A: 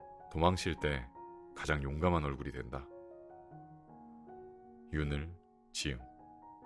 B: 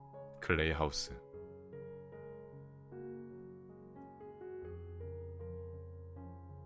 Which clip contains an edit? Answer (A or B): B